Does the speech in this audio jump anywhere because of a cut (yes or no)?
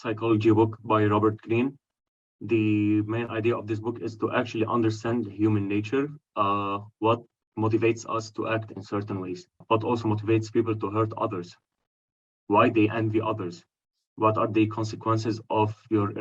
yes